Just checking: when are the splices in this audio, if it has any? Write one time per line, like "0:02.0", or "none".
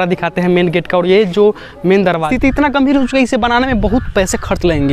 0:02.3